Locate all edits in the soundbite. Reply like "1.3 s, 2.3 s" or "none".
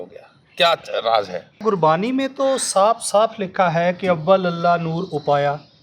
1.6 s

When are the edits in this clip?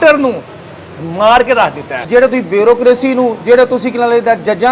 1.9 s

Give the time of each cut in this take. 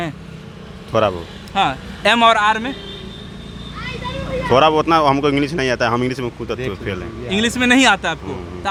none

